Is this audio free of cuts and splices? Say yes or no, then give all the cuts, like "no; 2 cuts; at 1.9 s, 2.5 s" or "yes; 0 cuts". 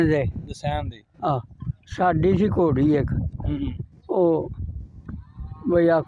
no; 1 cut; at 1.6 s